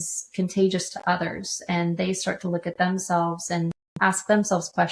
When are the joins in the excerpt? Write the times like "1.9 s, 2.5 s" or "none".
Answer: 3.8 s

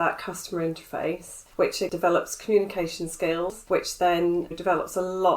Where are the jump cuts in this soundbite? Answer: 1.8 s

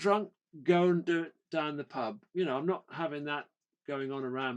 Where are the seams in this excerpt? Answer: 2.2 s

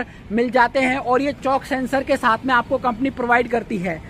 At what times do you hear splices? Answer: none

